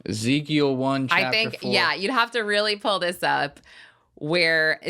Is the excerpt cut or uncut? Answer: cut